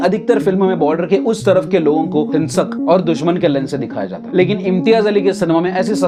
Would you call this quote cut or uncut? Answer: uncut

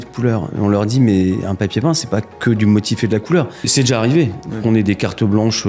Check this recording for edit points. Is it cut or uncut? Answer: cut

